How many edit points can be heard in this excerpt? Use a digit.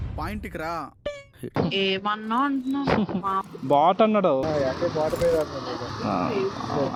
0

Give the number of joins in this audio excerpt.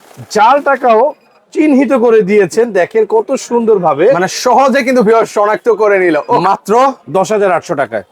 1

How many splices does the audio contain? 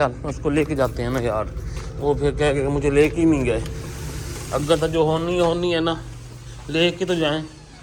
0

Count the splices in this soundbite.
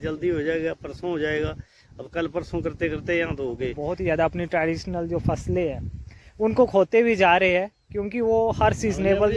1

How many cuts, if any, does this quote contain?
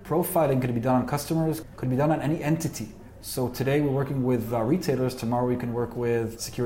2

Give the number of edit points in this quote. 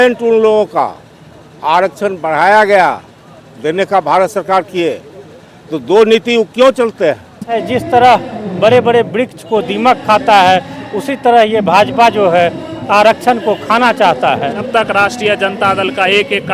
2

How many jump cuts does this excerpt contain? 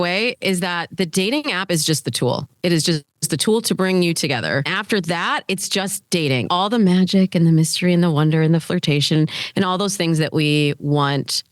2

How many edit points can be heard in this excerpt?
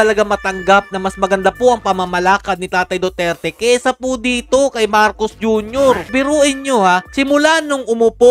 0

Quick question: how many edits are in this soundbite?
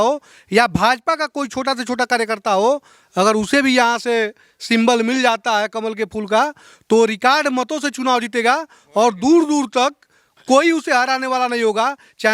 0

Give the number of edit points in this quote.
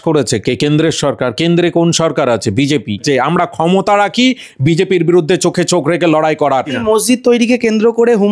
2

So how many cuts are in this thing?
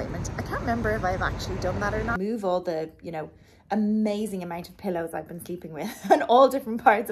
1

